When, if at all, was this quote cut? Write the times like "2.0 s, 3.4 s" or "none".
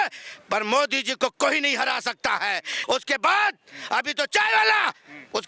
2.7 s